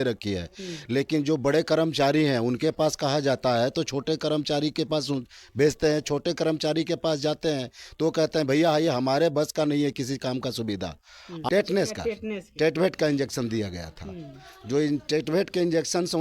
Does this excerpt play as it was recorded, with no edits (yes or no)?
no